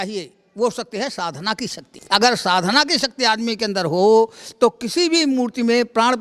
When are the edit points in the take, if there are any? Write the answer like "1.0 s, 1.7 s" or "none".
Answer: 1.9 s